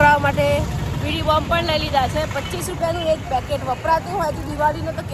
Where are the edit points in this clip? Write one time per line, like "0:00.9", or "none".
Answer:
none